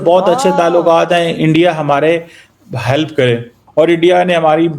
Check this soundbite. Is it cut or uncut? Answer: cut